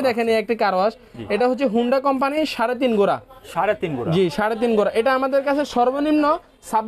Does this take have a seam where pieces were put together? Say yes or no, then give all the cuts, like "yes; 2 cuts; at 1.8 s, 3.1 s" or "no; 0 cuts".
no; 0 cuts